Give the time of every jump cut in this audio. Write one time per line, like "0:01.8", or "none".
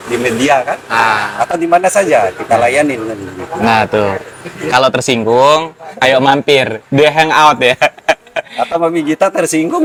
none